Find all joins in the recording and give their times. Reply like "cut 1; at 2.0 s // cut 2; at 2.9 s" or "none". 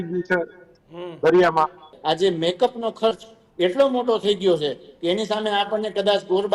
cut 1; at 1.9 s